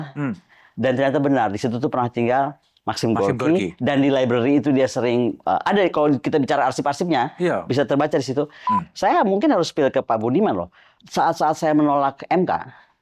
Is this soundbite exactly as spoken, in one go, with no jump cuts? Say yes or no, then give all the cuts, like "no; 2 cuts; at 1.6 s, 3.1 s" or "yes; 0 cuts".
no; 1 cut; at 8.7 s